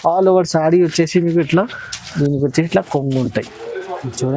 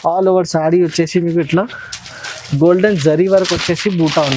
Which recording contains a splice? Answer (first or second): first